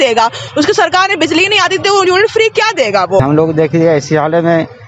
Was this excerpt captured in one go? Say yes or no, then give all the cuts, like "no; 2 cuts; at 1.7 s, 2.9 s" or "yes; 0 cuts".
no; 1 cut; at 3.2 s